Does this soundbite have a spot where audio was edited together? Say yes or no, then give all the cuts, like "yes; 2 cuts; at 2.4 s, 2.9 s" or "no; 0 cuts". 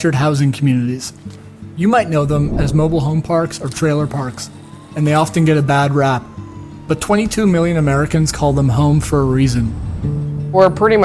no; 0 cuts